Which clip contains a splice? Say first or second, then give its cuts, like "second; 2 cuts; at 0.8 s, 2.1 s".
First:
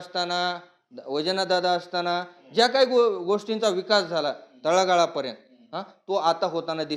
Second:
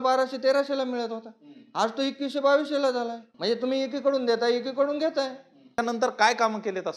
second; 2 cuts; at 3.2 s, 5.8 s